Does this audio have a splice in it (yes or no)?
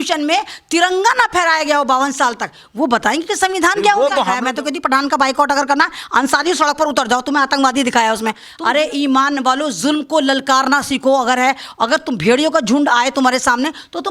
yes